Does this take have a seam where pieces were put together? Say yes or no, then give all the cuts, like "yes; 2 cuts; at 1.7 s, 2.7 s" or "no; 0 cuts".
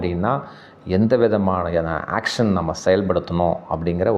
no; 0 cuts